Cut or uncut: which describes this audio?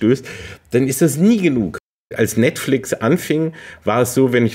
cut